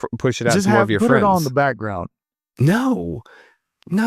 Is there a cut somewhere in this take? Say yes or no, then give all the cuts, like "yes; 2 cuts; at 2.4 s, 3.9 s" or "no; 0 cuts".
no; 0 cuts